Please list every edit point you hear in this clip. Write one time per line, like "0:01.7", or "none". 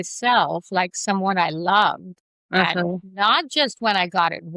none